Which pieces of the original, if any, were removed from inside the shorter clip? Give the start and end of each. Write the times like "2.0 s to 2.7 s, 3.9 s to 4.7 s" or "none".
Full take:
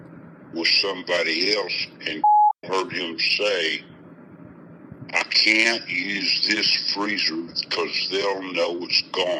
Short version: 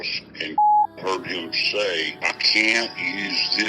3.8 s to 5.0 s